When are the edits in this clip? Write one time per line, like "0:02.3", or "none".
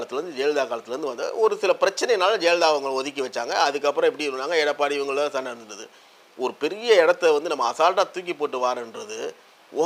none